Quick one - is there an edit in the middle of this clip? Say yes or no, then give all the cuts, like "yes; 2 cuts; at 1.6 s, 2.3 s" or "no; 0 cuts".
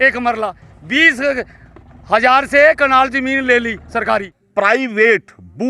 yes; 1 cut; at 4.4 s